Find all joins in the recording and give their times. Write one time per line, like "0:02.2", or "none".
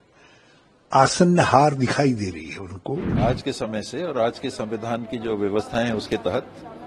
0:03.1